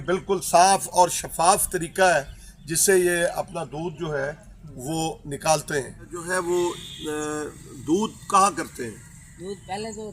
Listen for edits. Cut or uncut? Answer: cut